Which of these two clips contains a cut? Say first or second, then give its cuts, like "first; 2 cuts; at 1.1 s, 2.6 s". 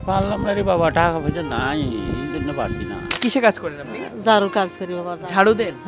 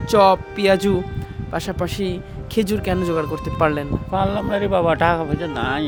first; 1 cut; at 3.2 s